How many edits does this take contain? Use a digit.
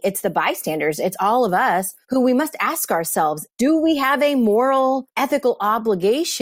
3